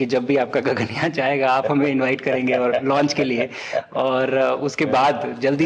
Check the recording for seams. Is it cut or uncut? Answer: uncut